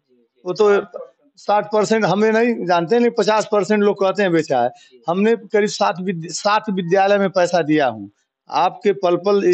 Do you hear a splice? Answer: no; 0 cuts

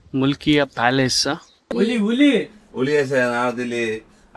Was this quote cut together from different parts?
yes; 1 cut; at 1.7 s

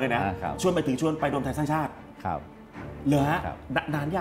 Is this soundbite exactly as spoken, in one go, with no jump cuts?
yes; 0 cuts

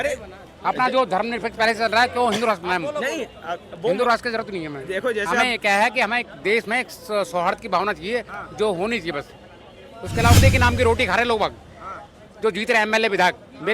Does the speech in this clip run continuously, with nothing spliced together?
no; 1 cut; at 10.4 s

